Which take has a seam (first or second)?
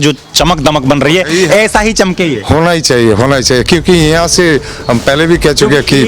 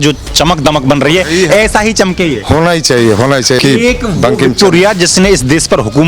second